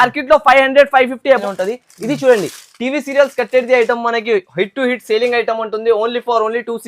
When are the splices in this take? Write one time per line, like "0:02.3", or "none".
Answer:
0:01.4